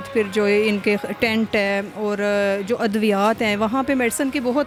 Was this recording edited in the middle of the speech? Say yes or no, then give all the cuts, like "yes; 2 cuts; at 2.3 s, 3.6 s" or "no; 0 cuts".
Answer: no; 0 cuts